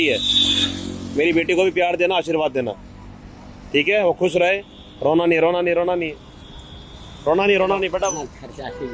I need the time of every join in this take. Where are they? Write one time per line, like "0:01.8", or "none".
none